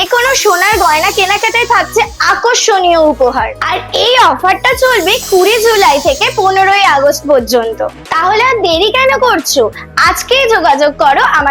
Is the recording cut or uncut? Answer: uncut